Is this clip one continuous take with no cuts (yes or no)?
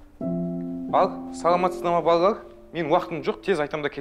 no